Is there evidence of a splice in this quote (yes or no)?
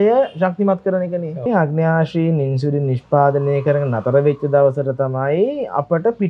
yes